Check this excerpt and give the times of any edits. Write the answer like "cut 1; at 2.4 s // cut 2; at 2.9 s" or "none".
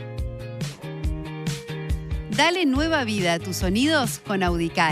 cut 1; at 2.3 s